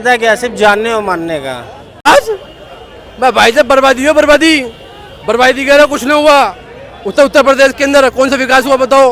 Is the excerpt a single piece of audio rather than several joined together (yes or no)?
no